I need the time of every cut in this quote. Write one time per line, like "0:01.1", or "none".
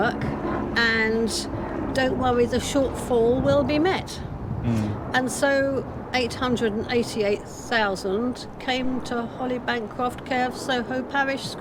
none

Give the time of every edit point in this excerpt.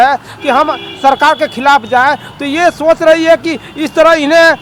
none

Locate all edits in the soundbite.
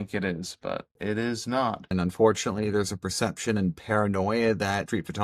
0:00.9
0:01.9

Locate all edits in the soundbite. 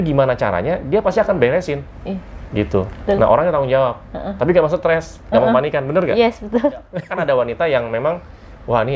0:07.0

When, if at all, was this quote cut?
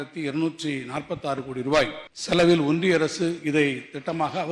0:02.1

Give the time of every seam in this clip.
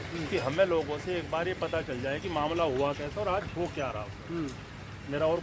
none

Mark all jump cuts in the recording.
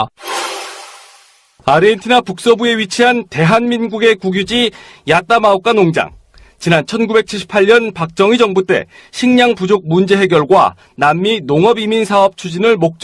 0:07.8

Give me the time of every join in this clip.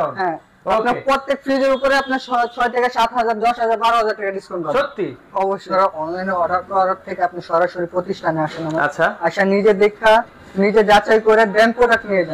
0:05.7

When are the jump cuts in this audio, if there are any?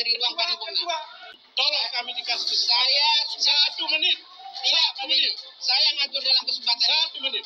0:01.2

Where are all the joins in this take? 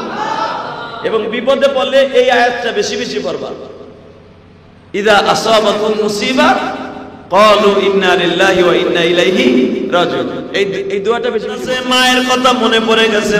0:11.8

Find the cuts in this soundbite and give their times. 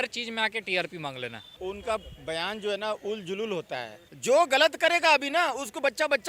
0:01.5
0:04.1

